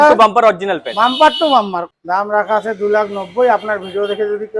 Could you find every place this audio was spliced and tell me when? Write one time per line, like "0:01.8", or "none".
0:01.8